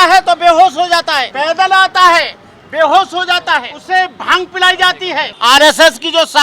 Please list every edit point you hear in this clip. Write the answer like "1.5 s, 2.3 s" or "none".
1.3 s, 3.8 s, 5.3 s